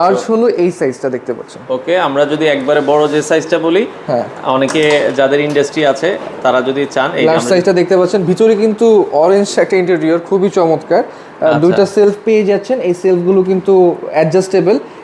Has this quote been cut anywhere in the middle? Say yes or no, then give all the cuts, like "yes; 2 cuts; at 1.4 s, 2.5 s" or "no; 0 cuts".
no; 0 cuts